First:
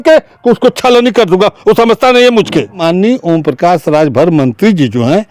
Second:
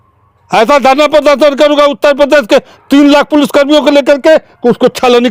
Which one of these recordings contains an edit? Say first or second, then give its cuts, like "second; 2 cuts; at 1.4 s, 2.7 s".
first; 1 cut; at 2.8 s